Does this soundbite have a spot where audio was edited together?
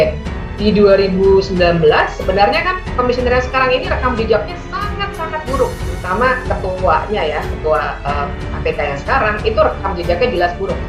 no; 0 cuts

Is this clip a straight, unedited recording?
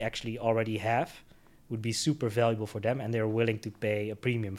yes; 0 cuts

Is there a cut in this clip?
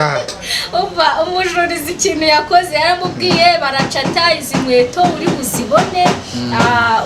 no; 0 cuts

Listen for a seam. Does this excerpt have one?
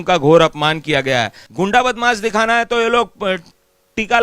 yes; 1 cut; at 1.4 s

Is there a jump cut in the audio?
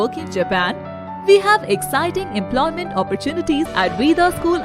yes; 1 cut; at 3.7 s

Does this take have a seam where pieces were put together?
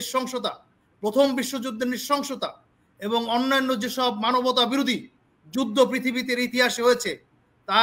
no; 0 cuts

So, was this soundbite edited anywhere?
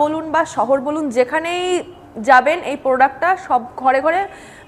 no; 0 cuts

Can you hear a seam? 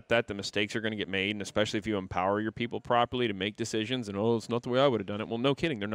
no; 0 cuts

